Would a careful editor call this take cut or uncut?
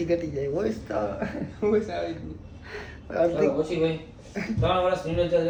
uncut